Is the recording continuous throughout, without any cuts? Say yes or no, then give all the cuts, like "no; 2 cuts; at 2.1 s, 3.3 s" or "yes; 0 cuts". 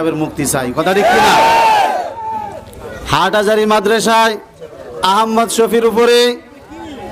yes; 0 cuts